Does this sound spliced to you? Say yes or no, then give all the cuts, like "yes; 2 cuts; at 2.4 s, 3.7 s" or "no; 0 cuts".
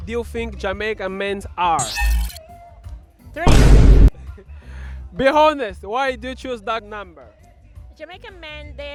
no; 0 cuts